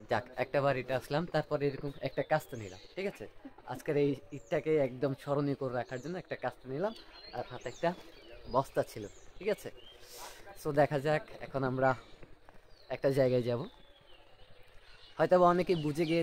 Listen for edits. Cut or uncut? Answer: uncut